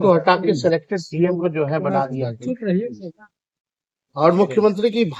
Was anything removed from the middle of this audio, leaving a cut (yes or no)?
no